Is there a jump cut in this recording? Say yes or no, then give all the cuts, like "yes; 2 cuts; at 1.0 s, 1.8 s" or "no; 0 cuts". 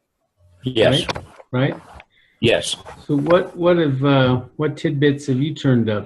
yes; 1 cut; at 1.1 s